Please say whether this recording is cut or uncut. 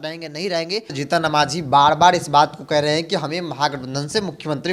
cut